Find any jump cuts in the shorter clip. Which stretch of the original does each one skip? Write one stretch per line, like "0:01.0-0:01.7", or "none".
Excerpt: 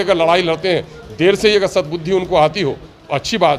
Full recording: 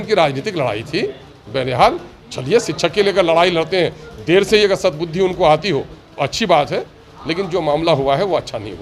none